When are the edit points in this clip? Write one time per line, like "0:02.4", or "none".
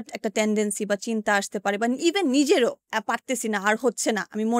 0:02.8